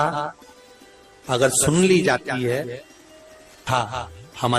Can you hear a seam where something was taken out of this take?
yes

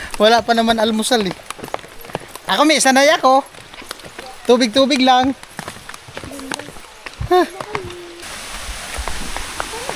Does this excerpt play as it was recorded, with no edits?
yes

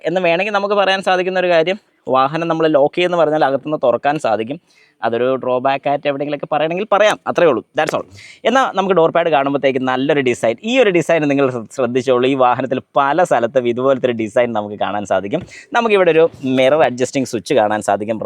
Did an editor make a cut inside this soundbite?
no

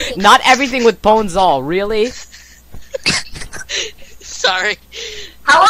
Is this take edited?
yes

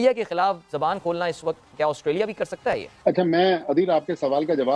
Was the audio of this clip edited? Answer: no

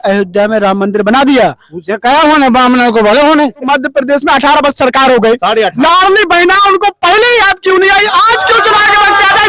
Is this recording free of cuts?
no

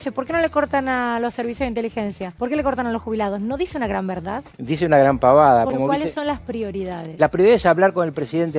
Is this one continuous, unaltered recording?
no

